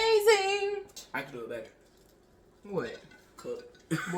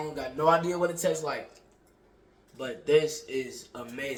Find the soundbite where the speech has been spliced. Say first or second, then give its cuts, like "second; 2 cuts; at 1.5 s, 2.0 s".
first; 1 cut; at 0.9 s